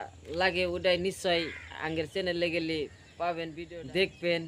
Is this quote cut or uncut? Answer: cut